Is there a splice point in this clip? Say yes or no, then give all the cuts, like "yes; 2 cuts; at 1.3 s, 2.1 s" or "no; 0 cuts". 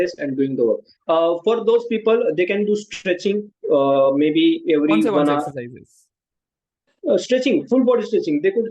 yes; 1 cut; at 0.9 s